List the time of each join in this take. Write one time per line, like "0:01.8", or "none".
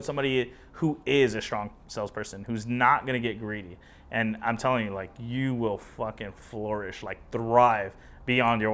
none